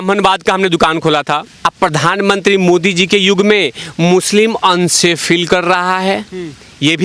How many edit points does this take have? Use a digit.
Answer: 1